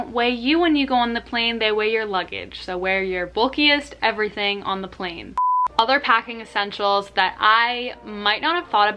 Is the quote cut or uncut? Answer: uncut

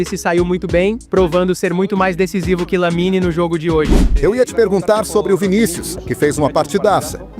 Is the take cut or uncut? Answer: cut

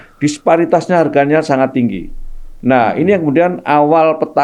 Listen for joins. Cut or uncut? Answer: uncut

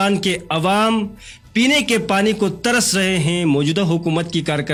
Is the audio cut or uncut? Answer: uncut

